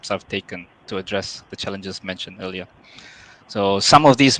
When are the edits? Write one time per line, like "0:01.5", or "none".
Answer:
none